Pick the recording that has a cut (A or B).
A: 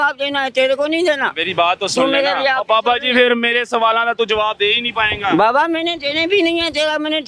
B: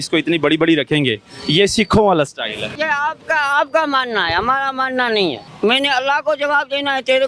B